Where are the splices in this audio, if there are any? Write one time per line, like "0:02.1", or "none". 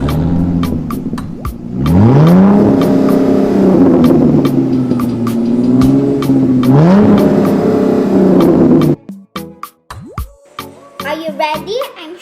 0:11.1